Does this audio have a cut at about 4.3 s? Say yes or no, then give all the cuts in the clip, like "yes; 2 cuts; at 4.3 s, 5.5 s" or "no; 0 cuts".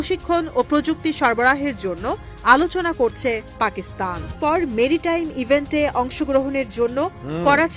yes; 1 cut; at 4.3 s